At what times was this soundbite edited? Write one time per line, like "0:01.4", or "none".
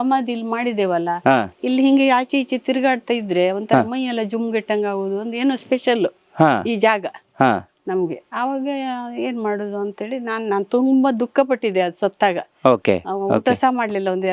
none